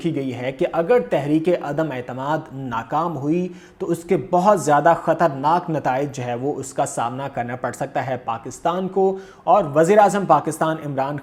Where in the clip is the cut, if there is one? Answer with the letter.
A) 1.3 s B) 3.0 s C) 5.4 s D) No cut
D